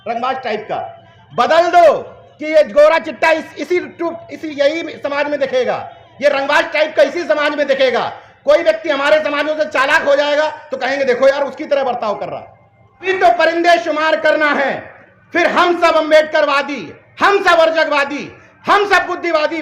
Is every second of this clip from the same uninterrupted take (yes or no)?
no